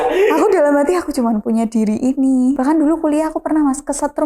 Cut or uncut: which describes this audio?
cut